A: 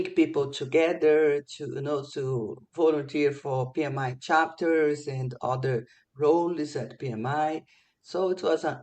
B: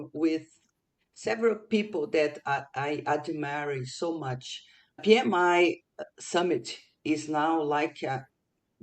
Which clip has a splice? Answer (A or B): B